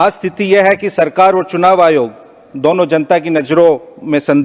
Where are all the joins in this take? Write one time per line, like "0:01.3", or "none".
none